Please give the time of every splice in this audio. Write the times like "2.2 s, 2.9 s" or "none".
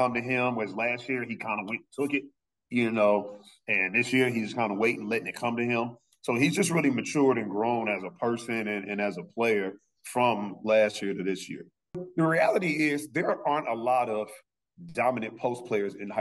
12.0 s